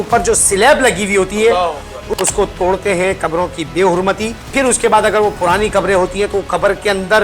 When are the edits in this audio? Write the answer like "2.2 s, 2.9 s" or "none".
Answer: 2.0 s, 4.4 s